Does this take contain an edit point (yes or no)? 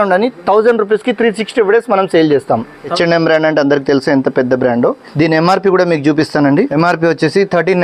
yes